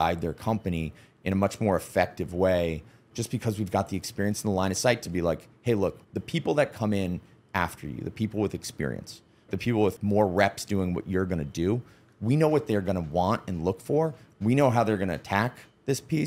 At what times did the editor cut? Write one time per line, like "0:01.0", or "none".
0:03.1
0:06.1
0:09.5